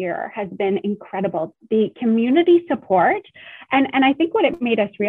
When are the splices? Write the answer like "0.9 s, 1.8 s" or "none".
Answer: 1.5 s